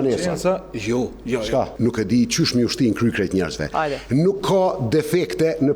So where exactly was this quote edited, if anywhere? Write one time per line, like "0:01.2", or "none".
0:01.7